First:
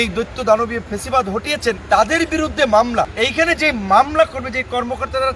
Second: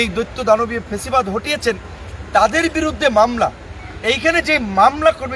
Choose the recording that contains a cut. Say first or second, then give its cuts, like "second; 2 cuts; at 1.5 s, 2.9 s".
first; 2 cuts; at 1.8 s, 3.1 s